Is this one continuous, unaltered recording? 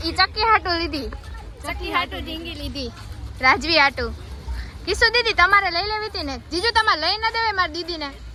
yes; 0 cuts

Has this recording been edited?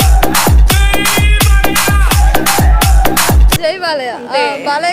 no; 0 cuts

